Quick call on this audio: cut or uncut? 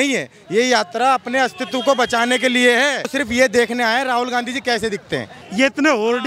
cut